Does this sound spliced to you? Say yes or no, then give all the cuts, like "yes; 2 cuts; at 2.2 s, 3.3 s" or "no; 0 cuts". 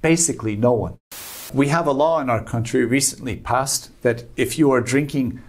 yes; 1 cut; at 1.5 s